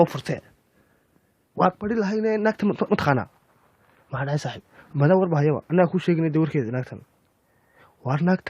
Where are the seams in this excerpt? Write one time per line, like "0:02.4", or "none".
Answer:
0:04.1